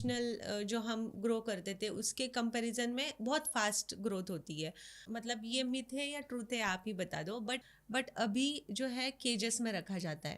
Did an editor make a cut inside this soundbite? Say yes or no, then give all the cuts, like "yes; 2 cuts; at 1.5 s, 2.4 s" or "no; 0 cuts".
yes; 2 cuts; at 5.0 s, 7.7 s